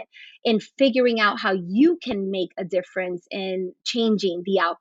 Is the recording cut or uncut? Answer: uncut